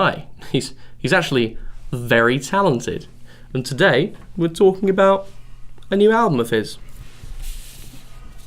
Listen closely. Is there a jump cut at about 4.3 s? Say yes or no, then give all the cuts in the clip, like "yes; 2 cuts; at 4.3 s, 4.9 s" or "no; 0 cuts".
no; 1 cut; at 6.1 s